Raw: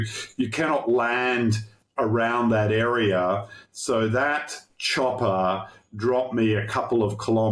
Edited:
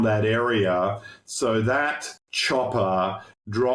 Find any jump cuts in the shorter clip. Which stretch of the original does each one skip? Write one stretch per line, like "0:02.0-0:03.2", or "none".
none